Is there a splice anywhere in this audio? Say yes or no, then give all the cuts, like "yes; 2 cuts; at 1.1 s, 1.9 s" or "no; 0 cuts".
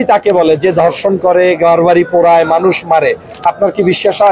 no; 0 cuts